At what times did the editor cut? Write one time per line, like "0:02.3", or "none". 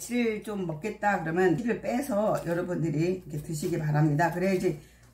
0:01.6